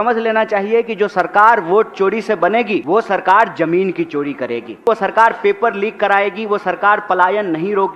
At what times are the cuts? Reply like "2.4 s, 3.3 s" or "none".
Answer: 2.8 s, 4.8 s